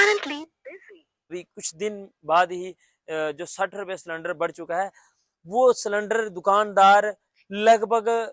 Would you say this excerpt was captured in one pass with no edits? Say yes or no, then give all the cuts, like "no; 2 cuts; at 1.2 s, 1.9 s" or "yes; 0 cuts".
no; 1 cut; at 1.3 s